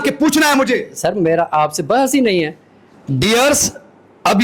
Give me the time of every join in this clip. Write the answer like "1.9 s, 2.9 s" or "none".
2.9 s